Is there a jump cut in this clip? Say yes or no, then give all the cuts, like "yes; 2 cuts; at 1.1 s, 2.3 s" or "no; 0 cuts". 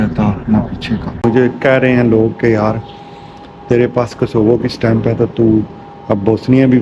yes; 1 cut; at 1.2 s